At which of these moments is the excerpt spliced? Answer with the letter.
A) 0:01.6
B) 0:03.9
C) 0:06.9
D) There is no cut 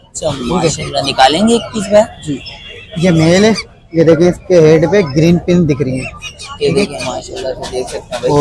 D